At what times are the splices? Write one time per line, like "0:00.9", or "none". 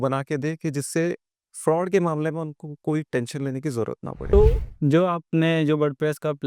0:04.2